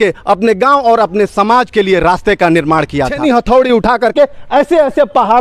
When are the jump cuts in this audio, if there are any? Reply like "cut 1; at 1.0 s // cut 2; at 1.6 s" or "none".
cut 1; at 3.1 s